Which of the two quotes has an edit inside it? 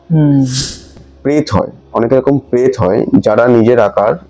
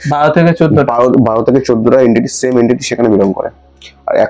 first; 1 cut; at 1.1 s

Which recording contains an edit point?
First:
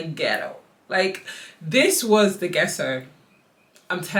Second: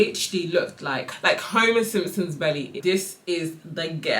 second; 2 cuts; at 1.1 s, 2.8 s

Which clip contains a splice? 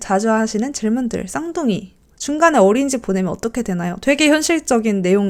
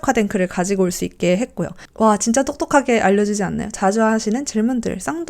second; 1 cut; at 1.8 s

